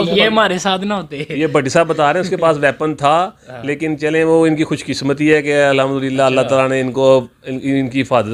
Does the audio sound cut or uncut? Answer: uncut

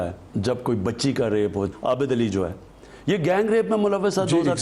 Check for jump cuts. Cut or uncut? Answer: cut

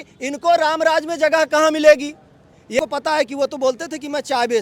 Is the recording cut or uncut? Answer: cut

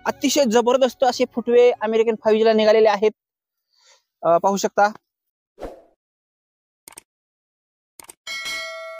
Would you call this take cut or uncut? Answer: uncut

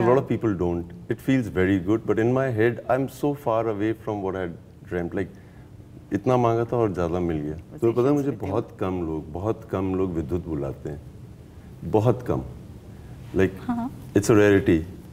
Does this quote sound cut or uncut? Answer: cut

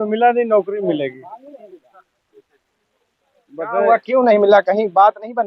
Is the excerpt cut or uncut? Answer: uncut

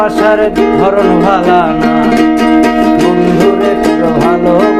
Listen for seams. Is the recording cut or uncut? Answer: uncut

